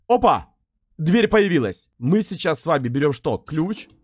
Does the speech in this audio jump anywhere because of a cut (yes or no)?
yes